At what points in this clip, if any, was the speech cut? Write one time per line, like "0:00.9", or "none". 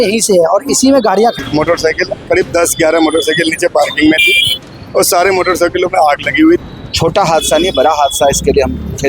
0:01.4
0:06.8